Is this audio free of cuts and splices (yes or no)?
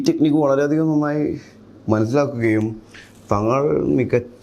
yes